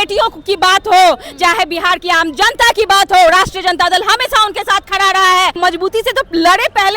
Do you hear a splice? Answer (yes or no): yes